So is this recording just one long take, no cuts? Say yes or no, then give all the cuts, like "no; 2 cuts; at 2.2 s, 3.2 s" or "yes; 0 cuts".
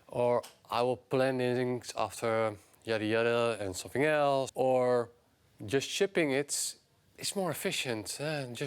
no; 1 cut; at 4.5 s